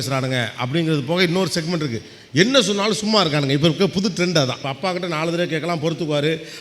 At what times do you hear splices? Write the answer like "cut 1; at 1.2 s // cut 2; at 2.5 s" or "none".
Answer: cut 1; at 4.7 s